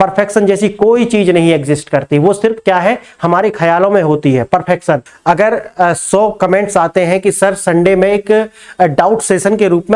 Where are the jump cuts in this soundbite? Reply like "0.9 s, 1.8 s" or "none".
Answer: 5.1 s